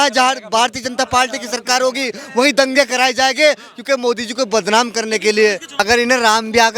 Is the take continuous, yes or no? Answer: no